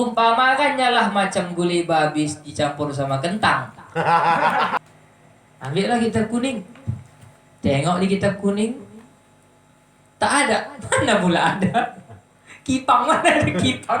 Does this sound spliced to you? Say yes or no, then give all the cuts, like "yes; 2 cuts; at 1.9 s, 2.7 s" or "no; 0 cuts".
yes; 1 cut; at 4.7 s